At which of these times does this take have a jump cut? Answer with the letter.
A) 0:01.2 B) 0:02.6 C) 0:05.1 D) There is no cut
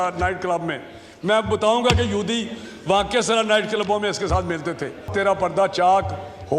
C